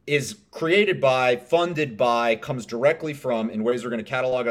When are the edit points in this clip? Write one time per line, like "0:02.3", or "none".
none